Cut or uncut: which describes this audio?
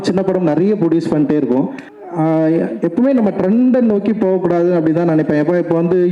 cut